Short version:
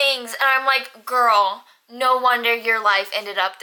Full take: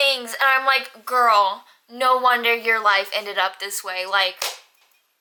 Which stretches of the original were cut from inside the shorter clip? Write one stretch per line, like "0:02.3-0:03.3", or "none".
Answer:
none